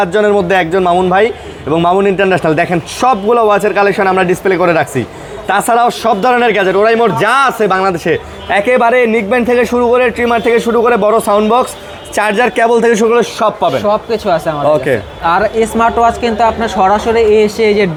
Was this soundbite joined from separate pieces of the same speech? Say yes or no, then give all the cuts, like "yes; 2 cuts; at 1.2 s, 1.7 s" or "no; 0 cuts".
no; 0 cuts